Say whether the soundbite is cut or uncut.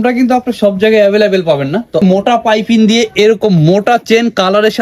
cut